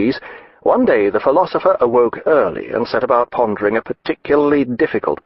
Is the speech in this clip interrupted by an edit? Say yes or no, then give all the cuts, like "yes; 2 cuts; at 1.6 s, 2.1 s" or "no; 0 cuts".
yes; 1 cut; at 3.3 s